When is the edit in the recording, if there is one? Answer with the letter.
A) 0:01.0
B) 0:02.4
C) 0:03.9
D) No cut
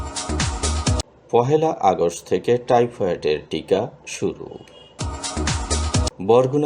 A